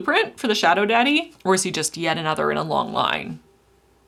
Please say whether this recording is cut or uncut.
uncut